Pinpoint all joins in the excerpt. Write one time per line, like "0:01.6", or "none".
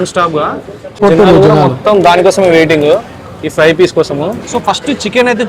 0:01.0
0:04.5